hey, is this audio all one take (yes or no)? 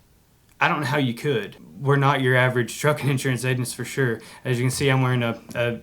no